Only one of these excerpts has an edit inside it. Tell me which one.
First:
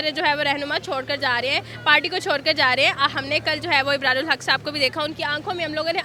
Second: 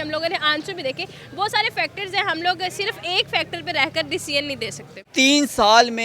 second; 1 cut; at 5.0 s

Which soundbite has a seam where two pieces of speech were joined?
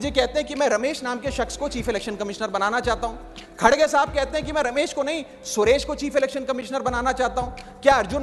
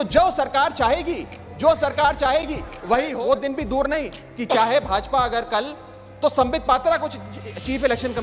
second; 1 cut; at 3.1 s

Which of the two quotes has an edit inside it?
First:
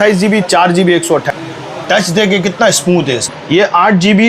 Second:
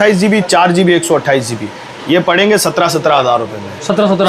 first; 2 cuts; at 1.8 s, 3.3 s

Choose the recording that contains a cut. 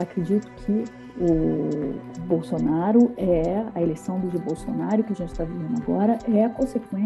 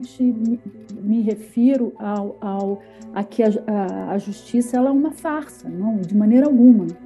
first; 1 cut; at 1.0 s

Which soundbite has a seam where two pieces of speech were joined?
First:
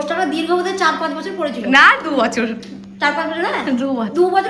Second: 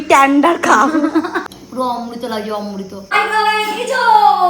second; 2 cuts; at 1.6 s, 3.1 s

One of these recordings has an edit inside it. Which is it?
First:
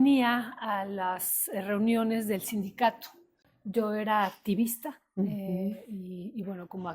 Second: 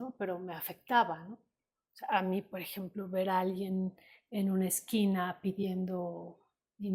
first; 1 cut; at 3.5 s

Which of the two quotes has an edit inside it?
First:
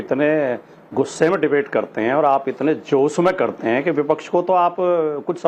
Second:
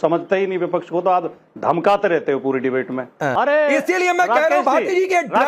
second; 1 cut; at 3.3 s

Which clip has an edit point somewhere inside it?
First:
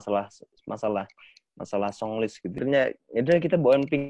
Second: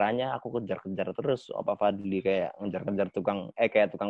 first; 1 cut; at 2.6 s

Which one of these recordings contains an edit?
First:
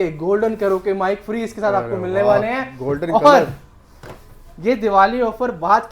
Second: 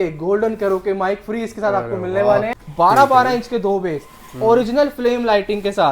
second; 1 cut; at 2.6 s

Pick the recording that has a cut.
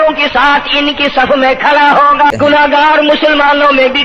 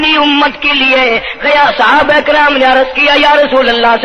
first; 1 cut; at 2.3 s

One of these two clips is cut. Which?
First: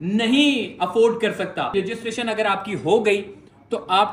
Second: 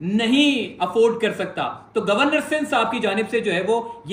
first; 1 cut; at 1.7 s

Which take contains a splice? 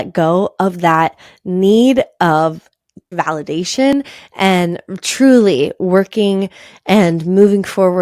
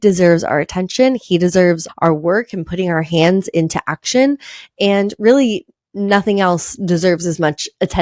first; 1 cut; at 3.1 s

